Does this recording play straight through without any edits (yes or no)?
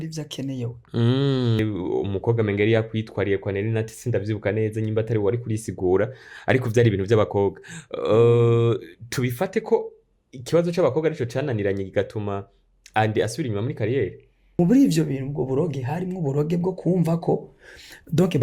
no